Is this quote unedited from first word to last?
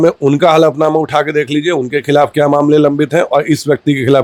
yes; 0 cuts

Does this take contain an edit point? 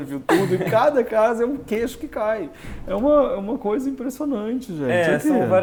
no; 0 cuts

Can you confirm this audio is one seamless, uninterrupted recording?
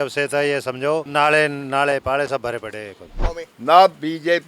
no; 2 cuts; at 1.1 s, 3.2 s

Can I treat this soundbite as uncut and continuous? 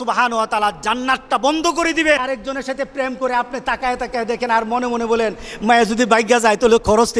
no; 1 cut; at 2.3 s

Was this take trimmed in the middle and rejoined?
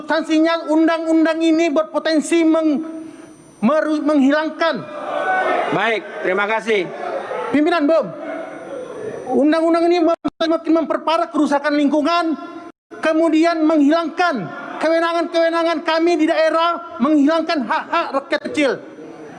no; 0 cuts

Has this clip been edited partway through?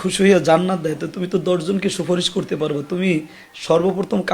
no; 0 cuts

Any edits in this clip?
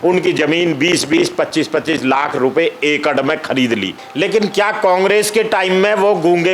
yes; 1 cut; at 4.0 s

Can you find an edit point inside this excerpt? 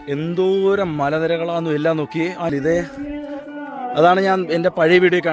yes; 1 cut; at 2.5 s

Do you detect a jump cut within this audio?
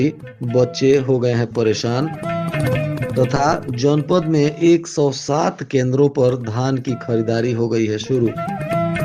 no; 0 cuts

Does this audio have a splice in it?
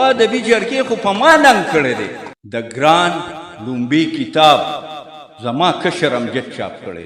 yes; 1 cut; at 2.5 s

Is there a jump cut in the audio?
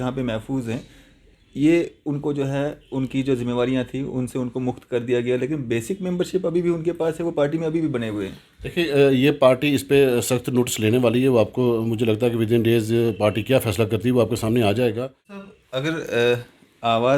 yes; 1 cut; at 15.5 s

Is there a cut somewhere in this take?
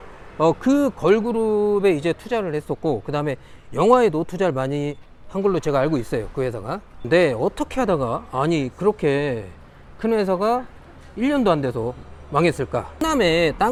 no; 0 cuts

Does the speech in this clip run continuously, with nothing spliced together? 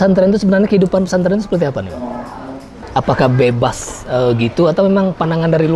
no; 1 cut; at 2.7 s

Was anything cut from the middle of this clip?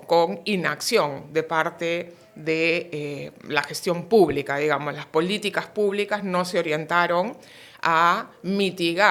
no; 0 cuts

